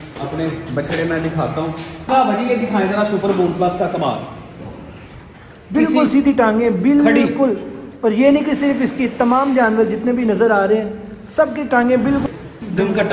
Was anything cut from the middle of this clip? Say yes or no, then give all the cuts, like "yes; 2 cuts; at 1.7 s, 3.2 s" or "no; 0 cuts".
yes; 2 cuts; at 2.1 s, 12.2 s